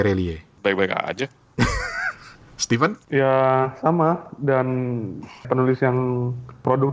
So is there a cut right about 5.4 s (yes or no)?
yes